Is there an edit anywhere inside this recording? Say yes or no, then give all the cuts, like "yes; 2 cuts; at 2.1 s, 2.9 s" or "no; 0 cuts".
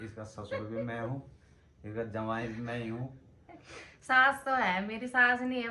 no; 0 cuts